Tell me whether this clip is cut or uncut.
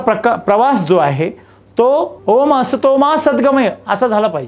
cut